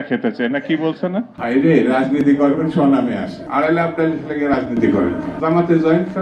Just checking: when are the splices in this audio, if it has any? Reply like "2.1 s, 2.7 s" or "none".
1.3 s